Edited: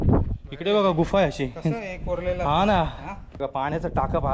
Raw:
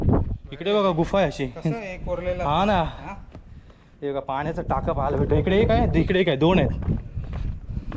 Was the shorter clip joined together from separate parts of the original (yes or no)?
yes